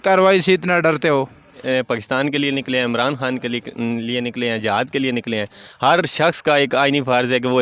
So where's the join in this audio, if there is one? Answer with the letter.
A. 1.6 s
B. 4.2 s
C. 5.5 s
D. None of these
A